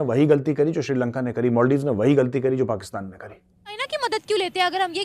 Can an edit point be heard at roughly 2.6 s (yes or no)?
no